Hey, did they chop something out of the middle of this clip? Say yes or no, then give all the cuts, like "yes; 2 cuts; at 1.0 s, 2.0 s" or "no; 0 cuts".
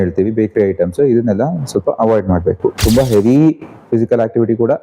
yes; 1 cut; at 2.8 s